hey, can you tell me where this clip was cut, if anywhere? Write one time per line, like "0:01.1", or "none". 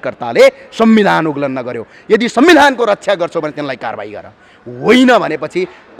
none